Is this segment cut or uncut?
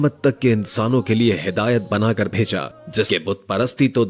cut